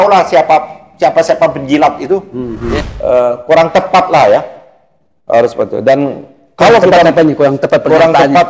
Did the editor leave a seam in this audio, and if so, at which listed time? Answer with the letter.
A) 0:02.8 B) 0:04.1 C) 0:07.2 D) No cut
A